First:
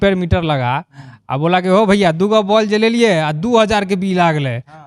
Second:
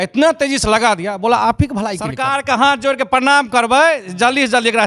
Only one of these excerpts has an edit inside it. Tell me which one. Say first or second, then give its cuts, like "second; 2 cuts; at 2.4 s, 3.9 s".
second; 1 cut; at 2.2 s